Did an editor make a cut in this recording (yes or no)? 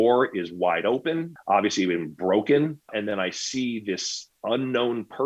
yes